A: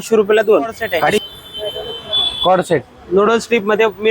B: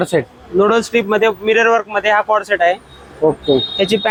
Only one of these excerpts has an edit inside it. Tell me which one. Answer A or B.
A